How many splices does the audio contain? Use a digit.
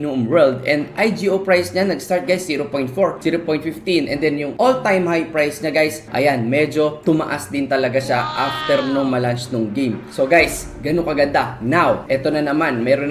1